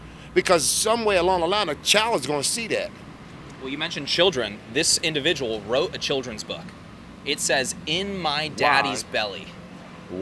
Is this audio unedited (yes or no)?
yes